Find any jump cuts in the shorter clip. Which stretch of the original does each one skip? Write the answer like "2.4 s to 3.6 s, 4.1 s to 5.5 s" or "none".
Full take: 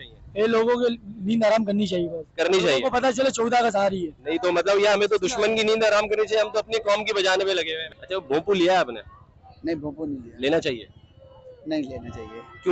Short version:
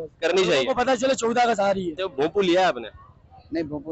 4.1 s to 8.1 s